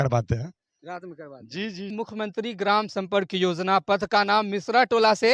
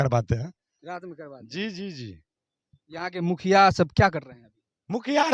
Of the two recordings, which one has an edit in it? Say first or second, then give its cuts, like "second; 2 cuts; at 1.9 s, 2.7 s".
first; 1 cut; at 1.9 s